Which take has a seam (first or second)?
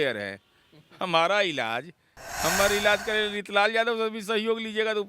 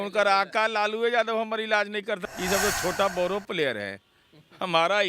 second